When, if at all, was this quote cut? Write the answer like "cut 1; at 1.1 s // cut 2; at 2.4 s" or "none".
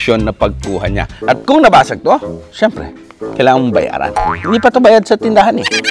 cut 1; at 1.2 s